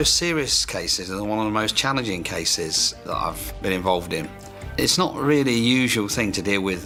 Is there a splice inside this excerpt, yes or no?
no